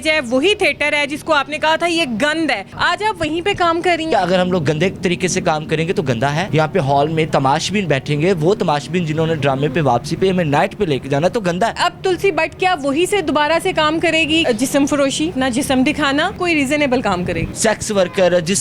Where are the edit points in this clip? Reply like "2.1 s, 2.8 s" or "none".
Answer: 2.7 s, 4.1 s, 6.5 s, 11.8 s, 14.4 s, 15.3 s, 16.4 s, 17.5 s

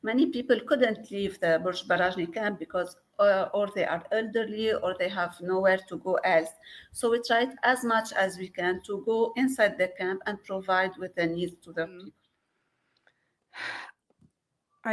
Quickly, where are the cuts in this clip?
12.2 s

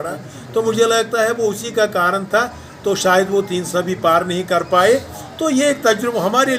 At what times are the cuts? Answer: none

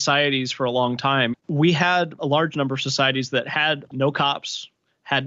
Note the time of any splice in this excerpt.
1.3 s, 2.2 s, 3.9 s

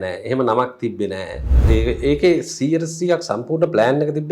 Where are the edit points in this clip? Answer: 1.6 s

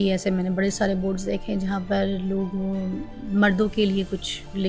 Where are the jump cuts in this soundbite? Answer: none

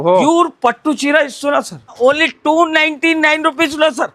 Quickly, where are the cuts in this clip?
1.9 s

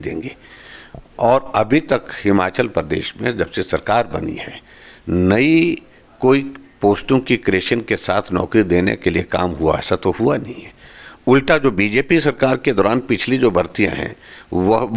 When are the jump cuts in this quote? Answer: none

